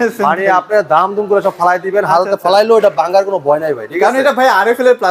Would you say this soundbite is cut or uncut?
uncut